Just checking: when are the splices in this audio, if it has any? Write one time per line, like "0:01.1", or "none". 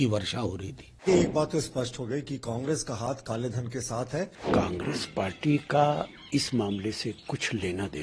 0:01.0
0:04.4